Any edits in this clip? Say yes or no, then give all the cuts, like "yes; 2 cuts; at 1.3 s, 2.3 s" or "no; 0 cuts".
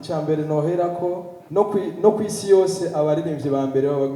yes; 1 cut; at 1.3 s